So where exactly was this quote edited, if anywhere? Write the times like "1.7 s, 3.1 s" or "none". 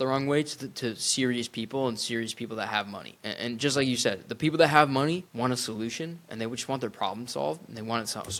3.1 s, 5.3 s